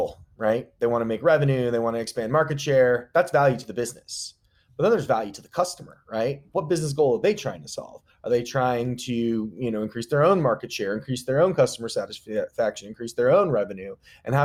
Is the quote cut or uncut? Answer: uncut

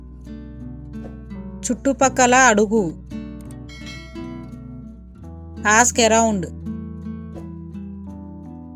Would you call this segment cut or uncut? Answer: cut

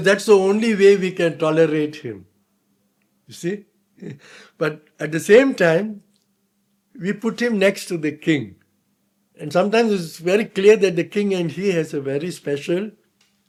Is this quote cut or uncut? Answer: uncut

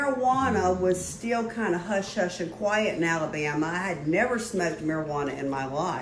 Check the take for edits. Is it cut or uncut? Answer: uncut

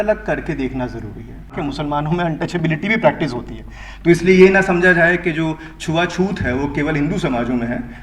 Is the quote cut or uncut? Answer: cut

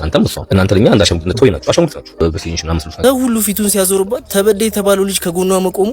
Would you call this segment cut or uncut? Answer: cut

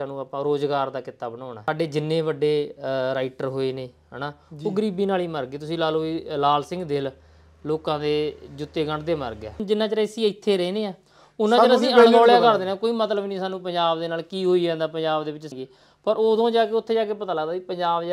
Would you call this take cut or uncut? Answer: cut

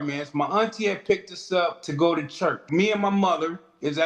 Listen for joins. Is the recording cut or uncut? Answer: cut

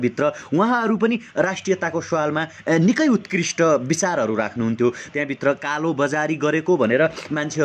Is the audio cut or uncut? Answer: uncut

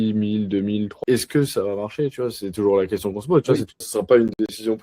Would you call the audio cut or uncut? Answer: cut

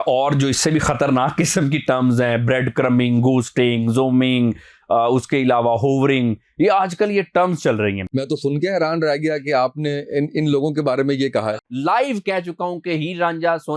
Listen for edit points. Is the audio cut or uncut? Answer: cut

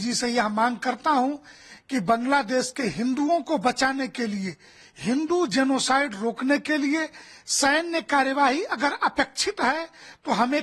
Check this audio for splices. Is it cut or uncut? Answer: uncut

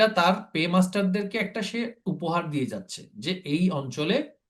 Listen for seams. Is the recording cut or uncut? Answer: uncut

